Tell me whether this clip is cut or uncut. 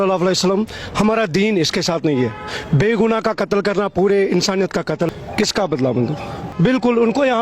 cut